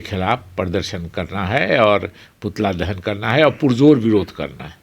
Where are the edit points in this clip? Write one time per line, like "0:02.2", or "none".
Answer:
none